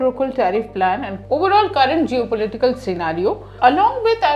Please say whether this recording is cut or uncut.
cut